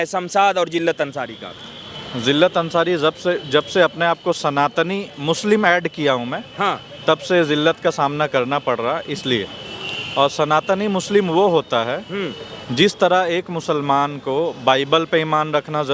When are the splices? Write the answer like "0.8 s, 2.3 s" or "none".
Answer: none

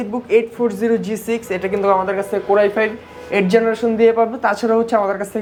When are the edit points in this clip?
none

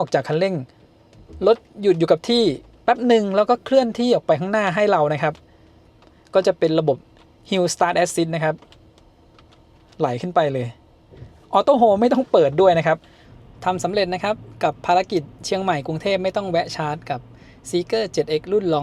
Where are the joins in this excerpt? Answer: 13.2 s

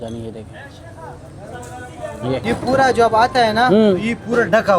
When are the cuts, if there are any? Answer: 2.4 s

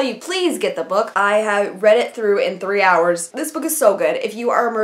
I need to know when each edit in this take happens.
1.1 s, 3.4 s

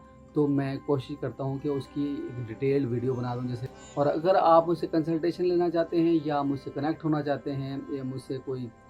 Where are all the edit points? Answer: 3.7 s

